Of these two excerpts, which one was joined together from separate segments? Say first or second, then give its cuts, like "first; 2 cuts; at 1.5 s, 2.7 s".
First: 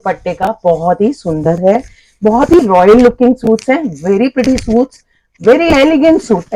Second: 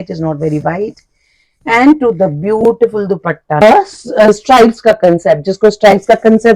second; 1 cut; at 3.6 s